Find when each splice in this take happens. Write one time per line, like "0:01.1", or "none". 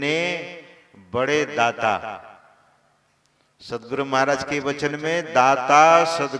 none